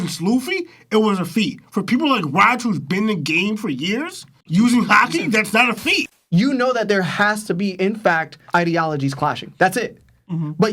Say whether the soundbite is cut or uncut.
cut